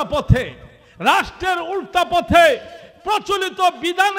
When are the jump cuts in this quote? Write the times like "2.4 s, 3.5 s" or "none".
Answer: none